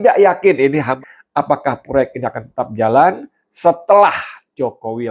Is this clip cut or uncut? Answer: cut